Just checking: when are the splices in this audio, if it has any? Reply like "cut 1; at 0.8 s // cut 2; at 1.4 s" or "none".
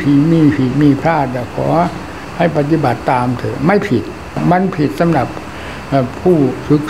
cut 1; at 4.4 s

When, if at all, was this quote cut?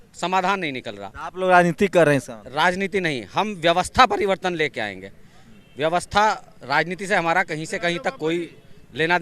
none

